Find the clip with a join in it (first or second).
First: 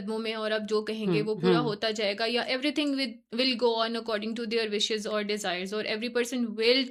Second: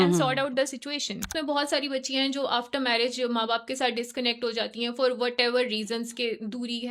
second